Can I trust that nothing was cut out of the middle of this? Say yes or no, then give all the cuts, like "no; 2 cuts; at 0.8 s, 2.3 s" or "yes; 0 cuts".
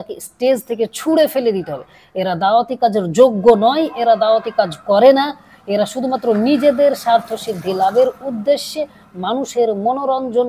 yes; 0 cuts